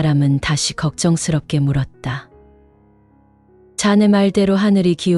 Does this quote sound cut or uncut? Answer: cut